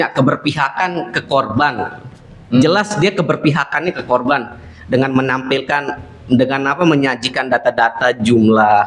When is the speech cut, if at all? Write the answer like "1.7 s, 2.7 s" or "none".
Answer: none

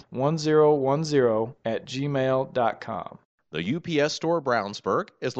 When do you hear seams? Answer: 3.3 s

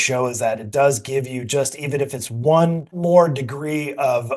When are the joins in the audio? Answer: 3.0 s

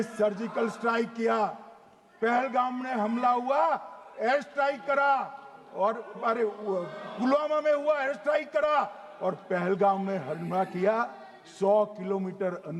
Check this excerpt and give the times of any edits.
none

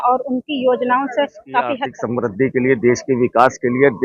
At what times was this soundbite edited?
1.9 s

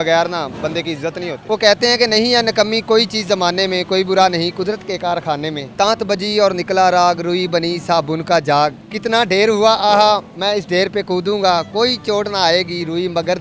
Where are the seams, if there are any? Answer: 1.4 s, 5.7 s, 8.8 s

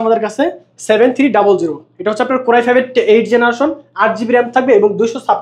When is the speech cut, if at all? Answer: none

